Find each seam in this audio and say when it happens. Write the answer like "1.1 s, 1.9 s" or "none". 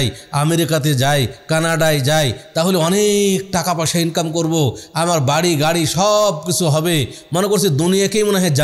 none